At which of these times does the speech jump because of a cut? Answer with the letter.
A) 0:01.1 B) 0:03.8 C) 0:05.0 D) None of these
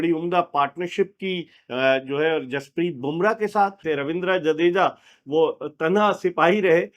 B